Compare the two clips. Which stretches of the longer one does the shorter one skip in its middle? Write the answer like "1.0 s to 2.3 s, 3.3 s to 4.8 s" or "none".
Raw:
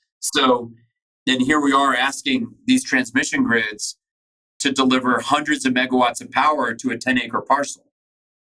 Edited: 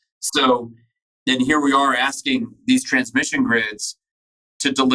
none